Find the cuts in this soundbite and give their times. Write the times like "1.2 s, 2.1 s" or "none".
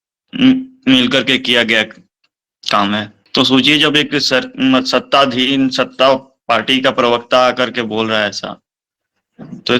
none